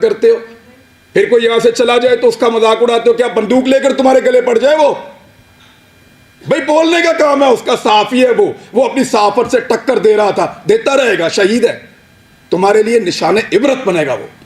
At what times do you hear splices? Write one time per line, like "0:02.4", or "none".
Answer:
none